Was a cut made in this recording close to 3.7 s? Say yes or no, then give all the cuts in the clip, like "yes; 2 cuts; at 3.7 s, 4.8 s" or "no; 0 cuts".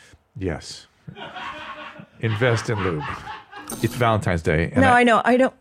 yes; 1 cut; at 3.7 s